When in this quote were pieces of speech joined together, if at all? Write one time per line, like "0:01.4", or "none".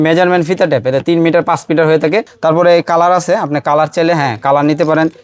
0:02.3